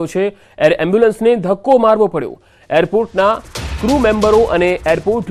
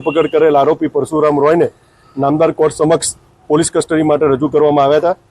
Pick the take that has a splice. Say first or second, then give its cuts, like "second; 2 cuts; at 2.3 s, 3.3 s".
second; 1 cut; at 1.2 s